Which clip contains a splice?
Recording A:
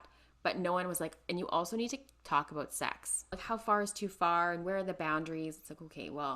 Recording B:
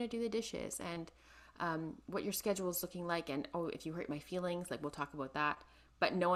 A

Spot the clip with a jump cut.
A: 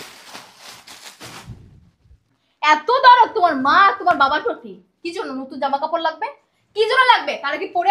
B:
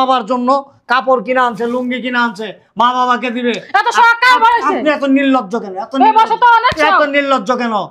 A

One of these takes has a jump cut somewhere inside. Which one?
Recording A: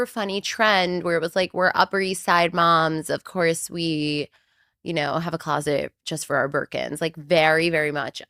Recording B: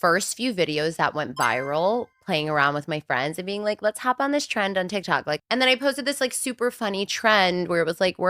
B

